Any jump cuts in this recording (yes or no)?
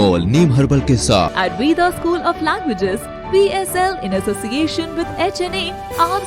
yes